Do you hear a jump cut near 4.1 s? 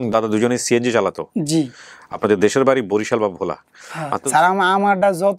yes; 1 cut; at 4.1 s

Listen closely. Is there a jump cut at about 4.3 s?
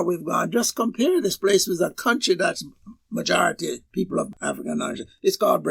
yes; 1 cut; at 4.3 s

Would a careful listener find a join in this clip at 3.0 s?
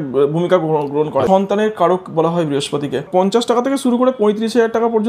yes; 2 cuts; at 1.3 s, 3.0 s

